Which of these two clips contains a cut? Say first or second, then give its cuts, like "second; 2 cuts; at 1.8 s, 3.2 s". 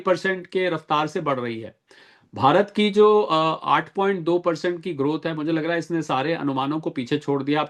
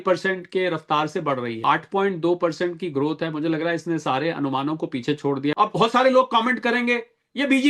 second; 2 cuts; at 1.6 s, 5.5 s